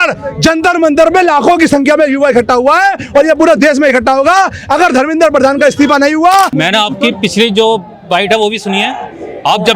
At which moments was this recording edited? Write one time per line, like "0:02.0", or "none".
0:06.5